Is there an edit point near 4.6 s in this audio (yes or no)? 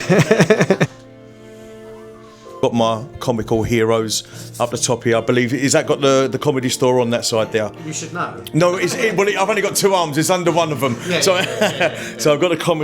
no